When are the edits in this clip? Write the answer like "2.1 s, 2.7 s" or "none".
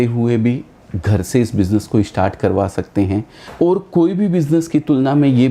3.4 s